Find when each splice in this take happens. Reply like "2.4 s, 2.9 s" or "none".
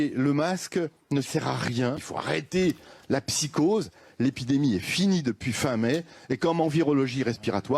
2.1 s